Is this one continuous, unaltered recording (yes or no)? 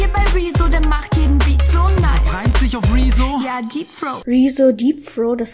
yes